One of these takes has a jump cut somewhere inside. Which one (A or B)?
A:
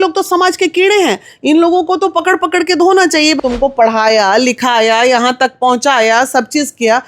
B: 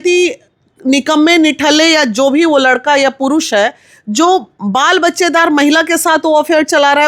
A